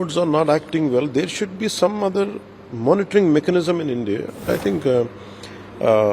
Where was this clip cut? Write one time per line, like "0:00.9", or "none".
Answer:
0:04.5